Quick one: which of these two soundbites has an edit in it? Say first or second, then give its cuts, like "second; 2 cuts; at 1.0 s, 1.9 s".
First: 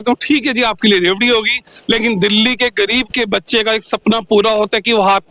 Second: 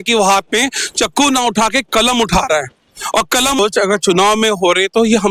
second; 1 cut; at 3.6 s